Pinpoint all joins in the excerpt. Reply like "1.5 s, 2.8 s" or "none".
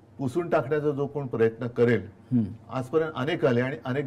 none